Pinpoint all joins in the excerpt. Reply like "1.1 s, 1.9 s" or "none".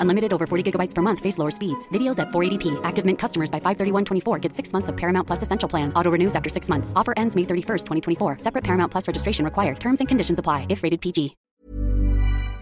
11.4 s